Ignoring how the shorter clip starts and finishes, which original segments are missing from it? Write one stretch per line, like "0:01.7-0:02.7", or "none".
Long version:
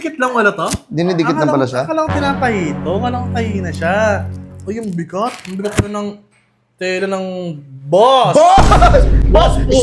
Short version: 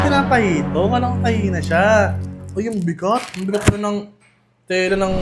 none